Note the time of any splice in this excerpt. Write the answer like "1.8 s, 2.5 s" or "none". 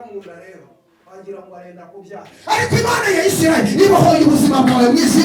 none